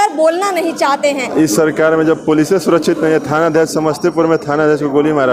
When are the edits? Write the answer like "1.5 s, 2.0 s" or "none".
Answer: 1.2 s